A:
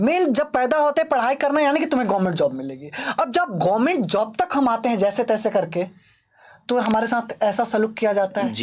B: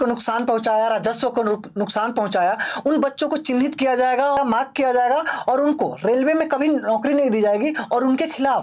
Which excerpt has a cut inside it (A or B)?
B